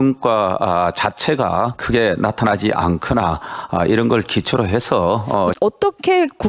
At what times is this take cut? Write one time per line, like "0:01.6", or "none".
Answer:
0:01.8
0:05.5

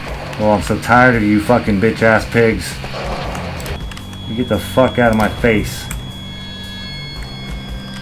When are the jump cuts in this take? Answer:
0:03.8

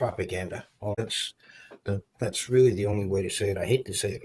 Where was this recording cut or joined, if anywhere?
0:01.0

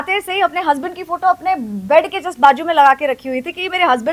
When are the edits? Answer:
none

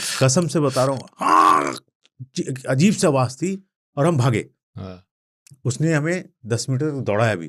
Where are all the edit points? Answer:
none

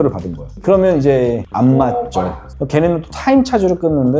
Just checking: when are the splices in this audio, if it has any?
none

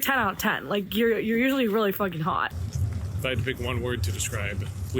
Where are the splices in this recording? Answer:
0:02.6

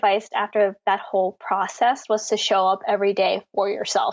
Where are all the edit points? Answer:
none

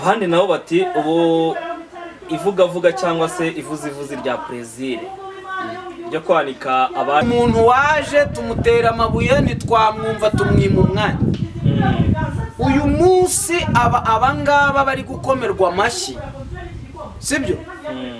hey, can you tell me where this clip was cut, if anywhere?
0:07.2

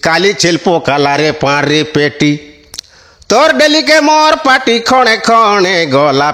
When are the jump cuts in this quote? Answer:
none

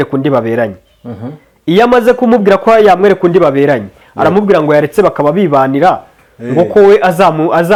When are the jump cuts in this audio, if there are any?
none

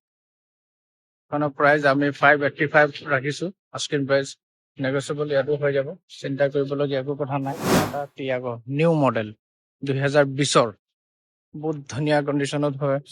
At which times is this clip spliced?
0:07.7

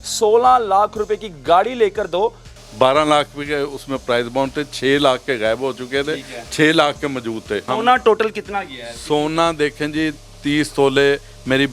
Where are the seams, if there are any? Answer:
0:02.5
0:07.7

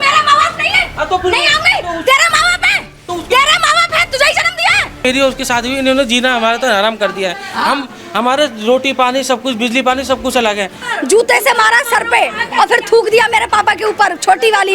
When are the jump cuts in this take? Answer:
0:05.0
0:10.8

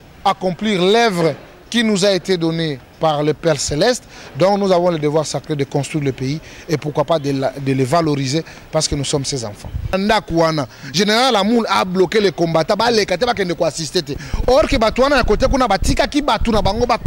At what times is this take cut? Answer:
0:09.9

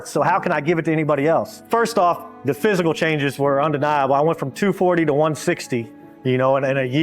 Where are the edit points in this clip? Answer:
none

